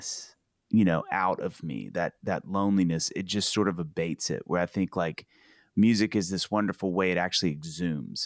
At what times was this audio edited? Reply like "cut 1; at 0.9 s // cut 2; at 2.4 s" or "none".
none